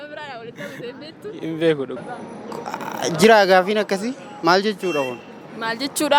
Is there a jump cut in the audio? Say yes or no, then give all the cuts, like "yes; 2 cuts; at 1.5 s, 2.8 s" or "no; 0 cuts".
yes; 1 cut; at 1.9 s